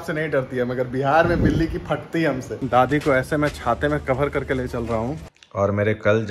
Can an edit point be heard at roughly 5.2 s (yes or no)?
yes